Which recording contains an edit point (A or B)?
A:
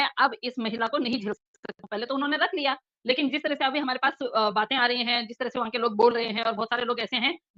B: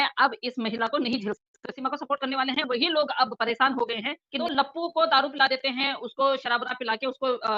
B